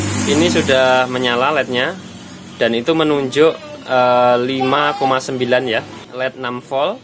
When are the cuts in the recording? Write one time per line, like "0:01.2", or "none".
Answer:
0:06.0